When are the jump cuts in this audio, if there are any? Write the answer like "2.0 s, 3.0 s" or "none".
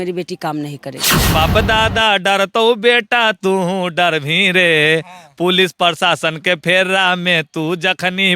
1.3 s